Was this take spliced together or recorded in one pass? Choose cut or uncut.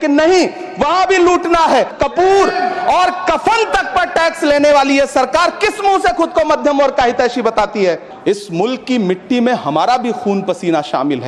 cut